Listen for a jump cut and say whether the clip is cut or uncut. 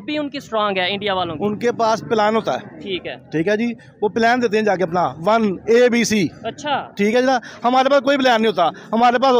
uncut